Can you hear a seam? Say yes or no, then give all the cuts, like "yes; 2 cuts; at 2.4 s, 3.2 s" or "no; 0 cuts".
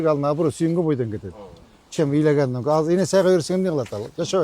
no; 0 cuts